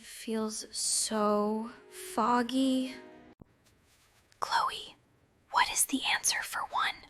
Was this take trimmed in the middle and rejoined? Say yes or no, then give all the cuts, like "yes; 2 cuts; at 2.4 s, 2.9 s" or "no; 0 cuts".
no; 0 cuts